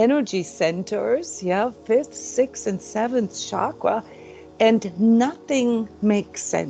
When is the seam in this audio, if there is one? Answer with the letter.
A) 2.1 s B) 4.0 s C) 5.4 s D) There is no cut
D